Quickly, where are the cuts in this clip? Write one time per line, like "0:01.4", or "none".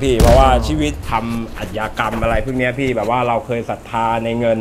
0:01.0